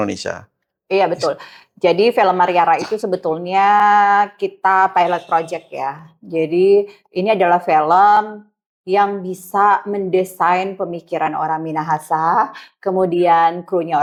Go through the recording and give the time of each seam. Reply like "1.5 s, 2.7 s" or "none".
none